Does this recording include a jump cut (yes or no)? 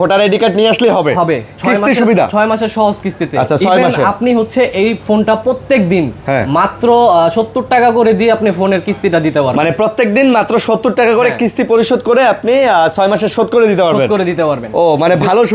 no